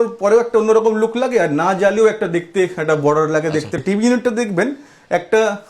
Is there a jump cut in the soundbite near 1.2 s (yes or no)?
no